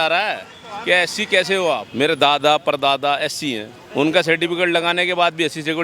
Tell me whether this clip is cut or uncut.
cut